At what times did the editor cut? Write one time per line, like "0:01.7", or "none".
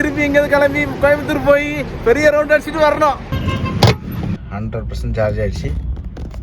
none